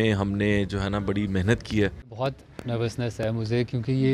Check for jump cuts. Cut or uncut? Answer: cut